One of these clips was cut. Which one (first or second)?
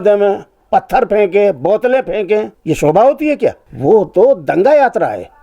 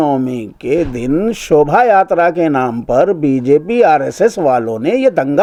first